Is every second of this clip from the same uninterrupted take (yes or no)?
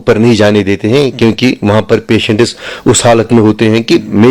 yes